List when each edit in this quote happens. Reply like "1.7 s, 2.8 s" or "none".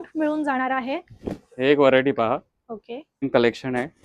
3.1 s